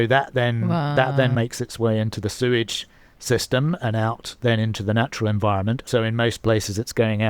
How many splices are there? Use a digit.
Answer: 2